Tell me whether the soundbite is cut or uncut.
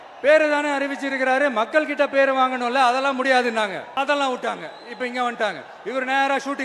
cut